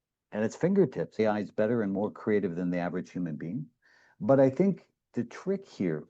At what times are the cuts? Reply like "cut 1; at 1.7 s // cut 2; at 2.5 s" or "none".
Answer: cut 1; at 1.2 s // cut 2; at 5.0 s